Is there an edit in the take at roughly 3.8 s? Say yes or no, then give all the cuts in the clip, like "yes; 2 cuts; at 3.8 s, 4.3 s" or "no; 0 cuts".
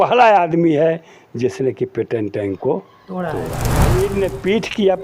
yes; 1 cut; at 3.8 s